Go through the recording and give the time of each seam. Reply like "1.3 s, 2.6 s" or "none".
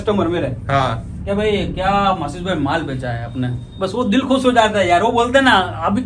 none